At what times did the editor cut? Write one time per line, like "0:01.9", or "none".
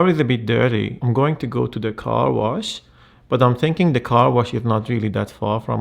0:01.0

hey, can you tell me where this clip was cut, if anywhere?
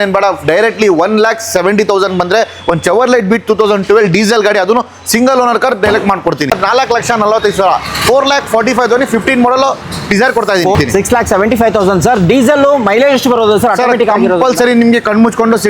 0:06.5
0:10.7

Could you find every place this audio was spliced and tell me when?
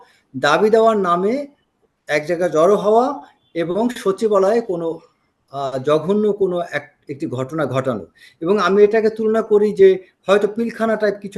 none

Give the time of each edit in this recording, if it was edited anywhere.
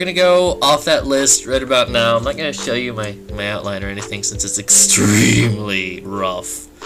0:03.6

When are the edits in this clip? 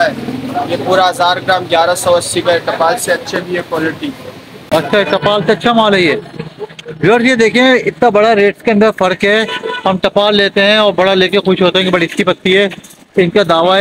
0:04.5

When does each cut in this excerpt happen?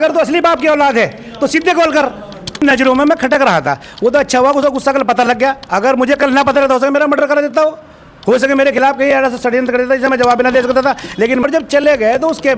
0:02.6
0:11.4

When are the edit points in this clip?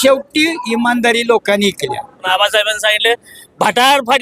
0:02.2

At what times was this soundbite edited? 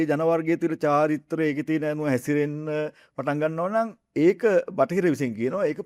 none

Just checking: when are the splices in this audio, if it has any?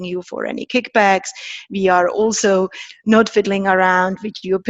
0:02.9

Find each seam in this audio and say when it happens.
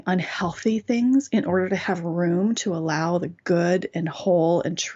none

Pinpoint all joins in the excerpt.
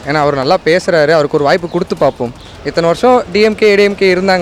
0:02.6

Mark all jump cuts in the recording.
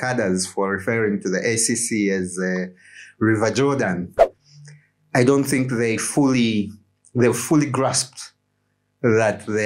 0:04.2

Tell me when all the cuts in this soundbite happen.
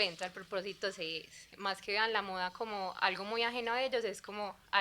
0:01.5

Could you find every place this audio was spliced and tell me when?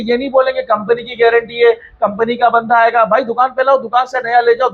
none

